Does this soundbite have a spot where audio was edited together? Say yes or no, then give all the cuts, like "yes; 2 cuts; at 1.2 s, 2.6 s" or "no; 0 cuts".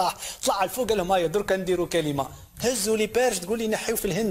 no; 0 cuts